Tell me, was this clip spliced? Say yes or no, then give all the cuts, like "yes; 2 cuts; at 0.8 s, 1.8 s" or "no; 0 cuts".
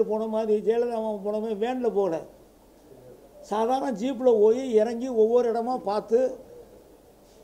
no; 0 cuts